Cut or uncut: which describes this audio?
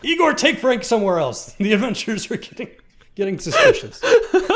cut